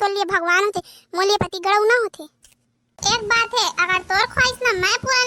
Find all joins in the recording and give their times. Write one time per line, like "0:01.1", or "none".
0:03.0